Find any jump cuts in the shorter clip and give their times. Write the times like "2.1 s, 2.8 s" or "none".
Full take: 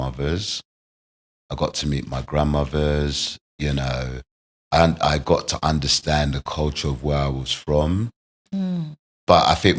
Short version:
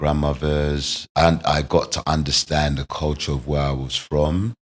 1.0 s